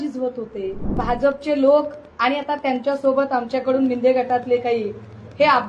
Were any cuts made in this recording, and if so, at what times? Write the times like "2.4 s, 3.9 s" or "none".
1.0 s